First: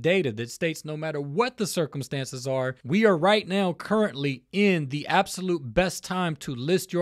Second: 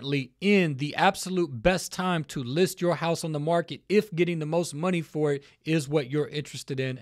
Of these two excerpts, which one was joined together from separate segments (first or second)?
first